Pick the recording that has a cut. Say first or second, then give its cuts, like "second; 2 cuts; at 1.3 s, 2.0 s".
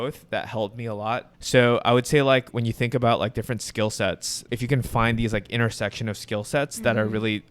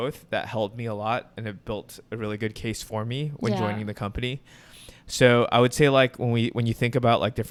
first; 3 cuts; at 1.3 s, 2.5 s, 4.5 s